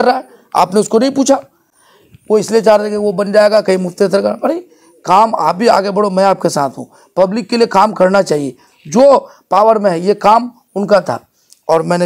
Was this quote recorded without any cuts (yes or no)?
yes